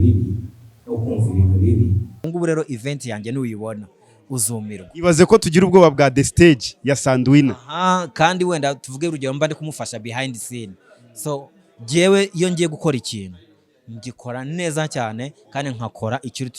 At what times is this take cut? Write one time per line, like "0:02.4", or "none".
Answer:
0:02.2